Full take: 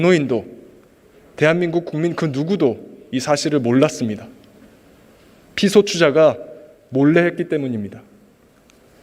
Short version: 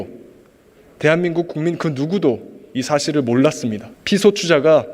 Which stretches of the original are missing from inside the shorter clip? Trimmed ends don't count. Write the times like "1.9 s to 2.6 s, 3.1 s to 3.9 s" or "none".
4.3 s to 5.4 s